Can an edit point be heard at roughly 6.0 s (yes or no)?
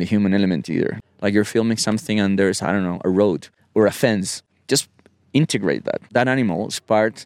yes